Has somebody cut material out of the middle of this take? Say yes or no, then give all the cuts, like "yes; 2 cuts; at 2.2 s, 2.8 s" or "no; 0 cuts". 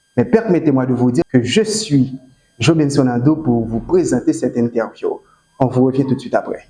yes; 1 cut; at 1.2 s